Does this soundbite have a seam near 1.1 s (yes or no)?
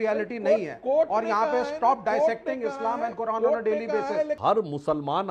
no